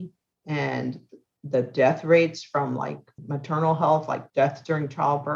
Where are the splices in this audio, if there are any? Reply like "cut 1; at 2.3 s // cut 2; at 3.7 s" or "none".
cut 1; at 3.1 s // cut 2; at 4.2 s